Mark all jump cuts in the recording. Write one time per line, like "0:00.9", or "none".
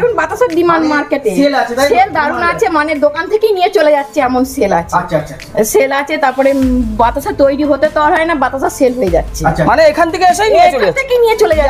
none